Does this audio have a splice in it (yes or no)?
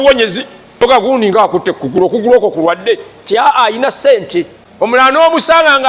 yes